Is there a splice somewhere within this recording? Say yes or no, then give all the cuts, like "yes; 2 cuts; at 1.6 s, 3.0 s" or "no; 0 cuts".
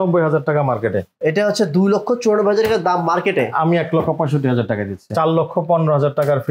yes; 1 cut; at 5.1 s